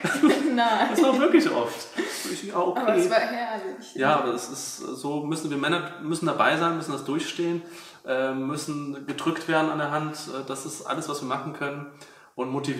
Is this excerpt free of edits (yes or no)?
yes